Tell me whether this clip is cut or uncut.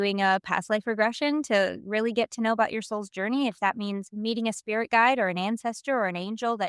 uncut